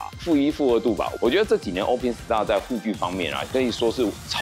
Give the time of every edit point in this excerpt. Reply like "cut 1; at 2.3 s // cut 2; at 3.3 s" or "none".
cut 1; at 1.1 s